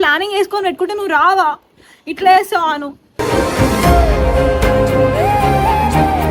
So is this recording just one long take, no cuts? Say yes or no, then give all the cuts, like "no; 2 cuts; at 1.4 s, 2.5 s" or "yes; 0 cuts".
yes; 0 cuts